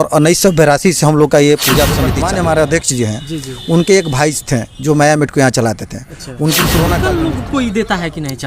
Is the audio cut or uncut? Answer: cut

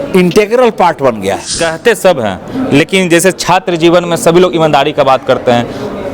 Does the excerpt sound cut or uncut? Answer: cut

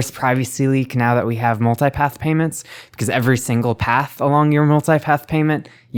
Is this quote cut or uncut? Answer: uncut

